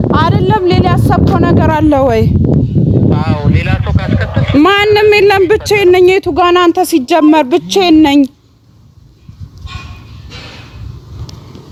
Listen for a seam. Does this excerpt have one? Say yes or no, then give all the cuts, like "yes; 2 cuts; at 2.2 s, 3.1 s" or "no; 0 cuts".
no; 0 cuts